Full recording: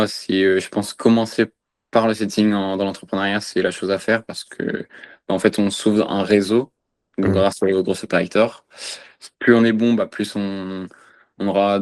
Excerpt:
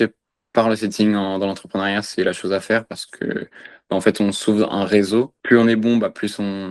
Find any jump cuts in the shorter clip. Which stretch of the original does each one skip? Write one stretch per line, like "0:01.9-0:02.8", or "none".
0:06.7-0:09.3